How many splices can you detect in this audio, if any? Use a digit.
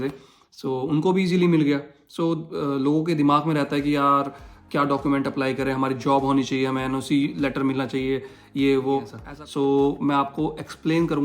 1